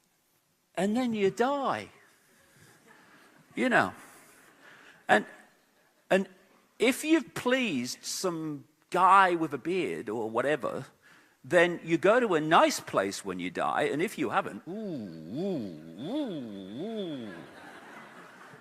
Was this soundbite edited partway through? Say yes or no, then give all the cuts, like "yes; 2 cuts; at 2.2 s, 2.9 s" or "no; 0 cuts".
yes; 1 cut; at 10.2 s